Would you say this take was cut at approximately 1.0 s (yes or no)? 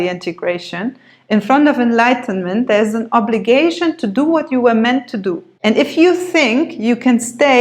no